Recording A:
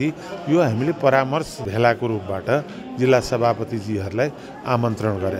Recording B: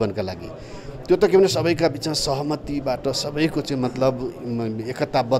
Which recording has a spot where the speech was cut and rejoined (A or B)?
A